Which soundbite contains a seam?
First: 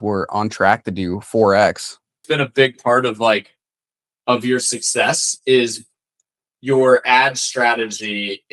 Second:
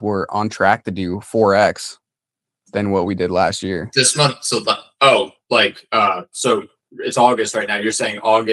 first; 1 cut; at 2.1 s

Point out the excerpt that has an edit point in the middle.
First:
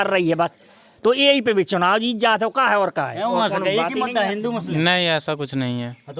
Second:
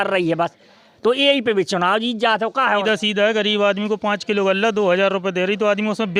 second; 1 cut; at 2.8 s

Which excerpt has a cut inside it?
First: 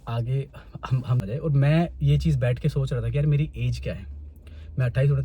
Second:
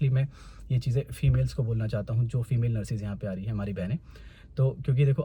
first; 1 cut; at 1.2 s

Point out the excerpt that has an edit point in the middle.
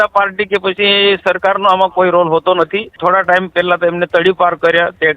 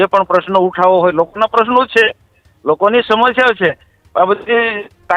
first; 1 cut; at 3.0 s

